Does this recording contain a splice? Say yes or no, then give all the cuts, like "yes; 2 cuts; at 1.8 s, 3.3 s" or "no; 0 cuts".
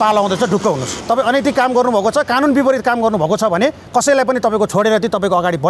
yes; 2 cuts; at 0.9 s, 4.7 s